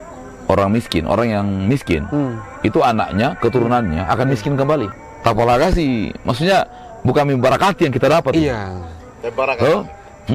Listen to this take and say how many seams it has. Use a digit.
1